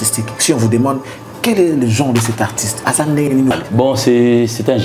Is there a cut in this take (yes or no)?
yes